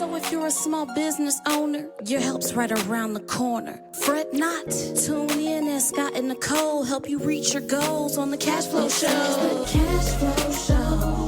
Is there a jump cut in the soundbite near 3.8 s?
no; 1 cut; at 9.6 s

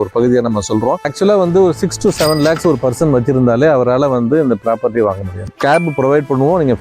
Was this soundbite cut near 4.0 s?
no; 2 cuts; at 1.1 s, 5.5 s

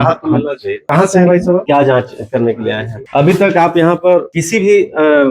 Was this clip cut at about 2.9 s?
yes; 4 cuts; at 0.8 s, 1.6 s, 2.9 s, 4.4 s

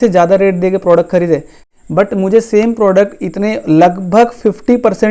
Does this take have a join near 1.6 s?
yes; 1 cut; at 1.6 s

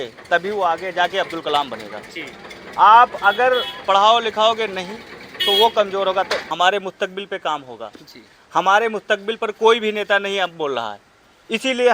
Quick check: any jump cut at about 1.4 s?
no; 1 cut; at 6.5 s

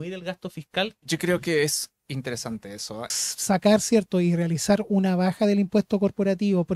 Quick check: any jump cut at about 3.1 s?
yes; 2 cuts; at 1.0 s, 3.1 s

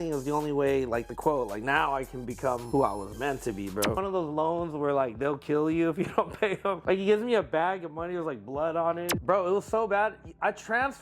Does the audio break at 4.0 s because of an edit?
yes; 4 cuts; at 2.6 s, 4.0 s, 6.8 s, 9.1 s

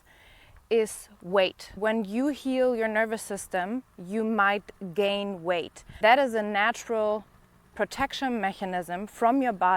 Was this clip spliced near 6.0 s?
yes; 2 cuts; at 1.8 s, 6.0 s

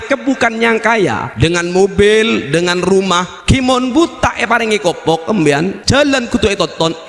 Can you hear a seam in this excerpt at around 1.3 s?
yes; 3 cuts; at 1.3 s, 3.3 s, 5.8 s

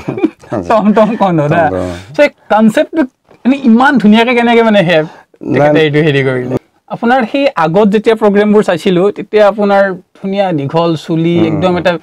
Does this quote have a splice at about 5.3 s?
no; 1 cut; at 6.5 s

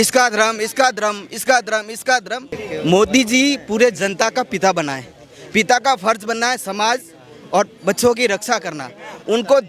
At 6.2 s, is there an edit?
no; 1 cut; at 2.6 s

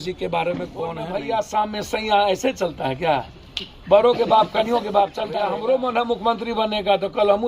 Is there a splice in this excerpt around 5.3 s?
yes; 2 cuts; at 1.0 s, 5.3 s

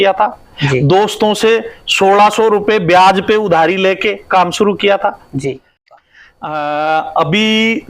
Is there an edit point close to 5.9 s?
yes; 1 cut; at 5.9 s

